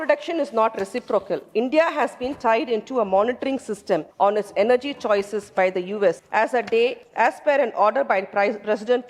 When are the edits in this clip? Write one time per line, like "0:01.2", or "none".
0:04.1
0:06.2
0:07.0